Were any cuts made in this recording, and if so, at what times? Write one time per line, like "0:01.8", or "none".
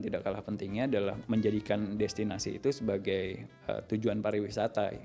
0:01.2